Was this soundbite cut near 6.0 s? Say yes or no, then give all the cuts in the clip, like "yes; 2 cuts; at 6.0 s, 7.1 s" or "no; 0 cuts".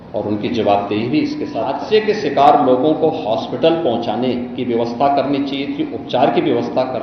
no; 1 cut; at 1.6 s